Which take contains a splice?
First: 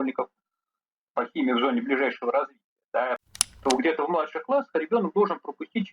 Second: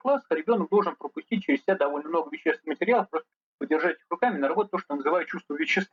first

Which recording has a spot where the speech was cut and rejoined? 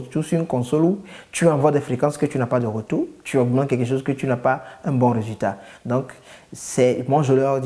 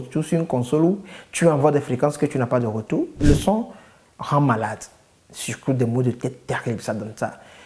second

